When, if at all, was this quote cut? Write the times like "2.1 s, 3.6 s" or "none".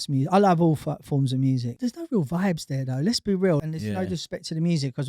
1.8 s, 3.6 s

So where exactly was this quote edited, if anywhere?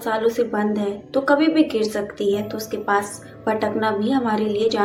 none

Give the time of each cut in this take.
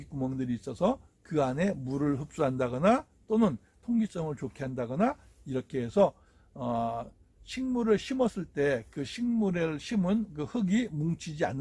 none

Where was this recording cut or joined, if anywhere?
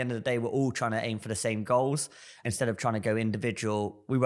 2.3 s

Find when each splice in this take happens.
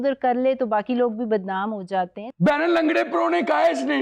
2.3 s

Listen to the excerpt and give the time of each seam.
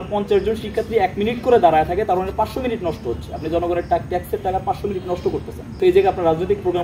5.6 s

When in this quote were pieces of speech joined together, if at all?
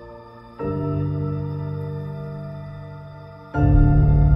none

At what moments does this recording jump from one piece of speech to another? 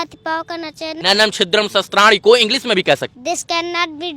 0.9 s, 3.2 s

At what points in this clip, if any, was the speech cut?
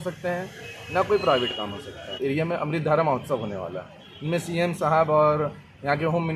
2.1 s

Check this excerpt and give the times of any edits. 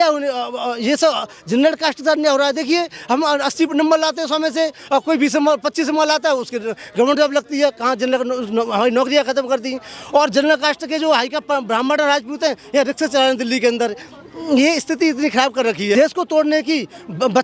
15.9 s

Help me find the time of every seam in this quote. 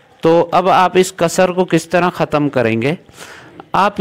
none

